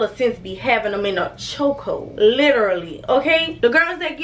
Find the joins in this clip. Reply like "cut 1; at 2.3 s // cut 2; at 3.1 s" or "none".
none